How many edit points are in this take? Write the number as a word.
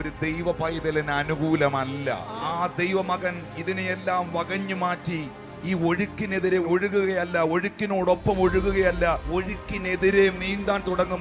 two